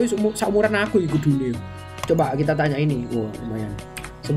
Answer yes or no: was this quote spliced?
no